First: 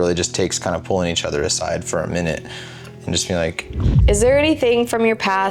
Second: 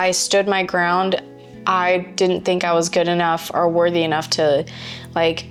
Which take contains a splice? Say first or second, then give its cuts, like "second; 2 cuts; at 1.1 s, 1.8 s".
first; 1 cut; at 3.9 s